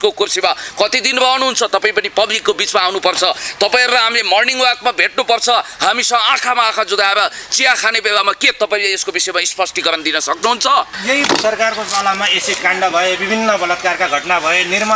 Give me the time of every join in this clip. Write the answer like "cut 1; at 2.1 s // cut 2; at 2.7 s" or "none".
none